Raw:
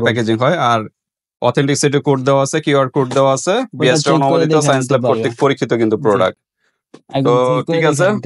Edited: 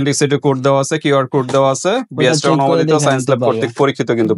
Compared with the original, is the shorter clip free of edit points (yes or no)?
yes